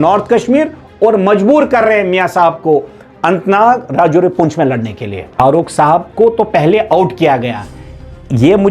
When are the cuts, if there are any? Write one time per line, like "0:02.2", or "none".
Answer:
0:05.2